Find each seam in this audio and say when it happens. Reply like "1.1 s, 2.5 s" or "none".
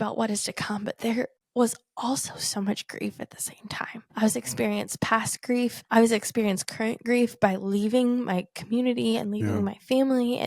1.4 s, 4.1 s, 5.8 s